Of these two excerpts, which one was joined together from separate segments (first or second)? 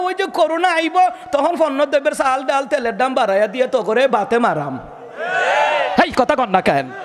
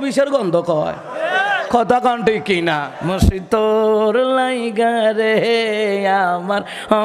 second